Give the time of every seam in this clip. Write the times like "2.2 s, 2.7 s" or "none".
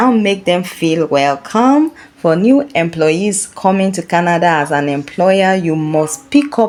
none

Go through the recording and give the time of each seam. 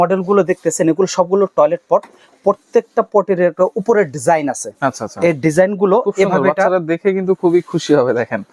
none

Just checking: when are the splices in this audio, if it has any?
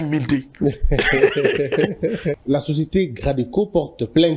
2.4 s

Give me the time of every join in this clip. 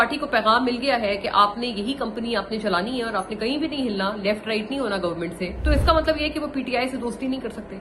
5.5 s

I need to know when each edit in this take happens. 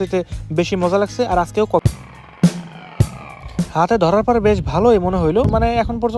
1.8 s

